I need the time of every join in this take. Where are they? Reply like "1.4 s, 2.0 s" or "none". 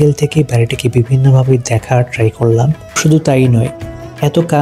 3.0 s